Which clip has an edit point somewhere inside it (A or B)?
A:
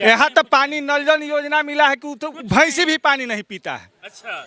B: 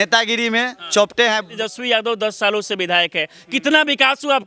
B